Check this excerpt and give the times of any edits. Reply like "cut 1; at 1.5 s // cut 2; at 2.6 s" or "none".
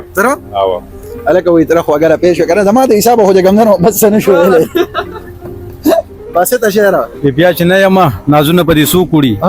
cut 1; at 6.2 s